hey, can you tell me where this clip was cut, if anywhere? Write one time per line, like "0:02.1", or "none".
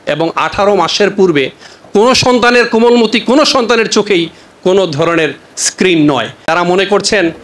0:06.4

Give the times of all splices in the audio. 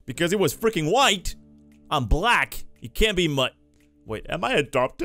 none

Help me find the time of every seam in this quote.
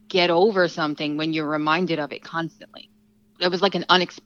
0:03.3

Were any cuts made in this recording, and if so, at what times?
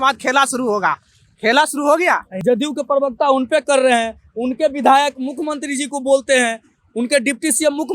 0:02.3

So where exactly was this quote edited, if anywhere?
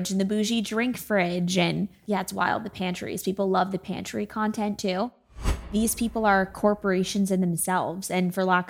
0:02.0
0:05.6

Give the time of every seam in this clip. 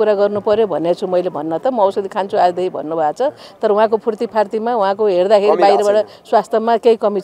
none

